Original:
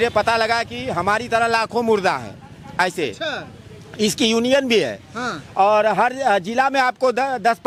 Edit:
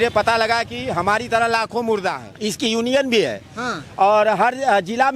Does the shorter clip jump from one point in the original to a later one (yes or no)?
yes